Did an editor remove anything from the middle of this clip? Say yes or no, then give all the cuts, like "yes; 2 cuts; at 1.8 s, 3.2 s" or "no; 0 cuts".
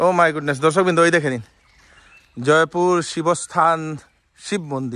no; 0 cuts